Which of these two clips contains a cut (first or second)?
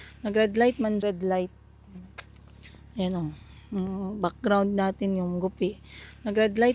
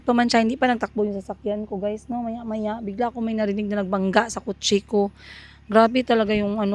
first